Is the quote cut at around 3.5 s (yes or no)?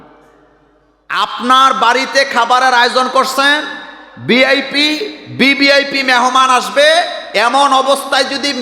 no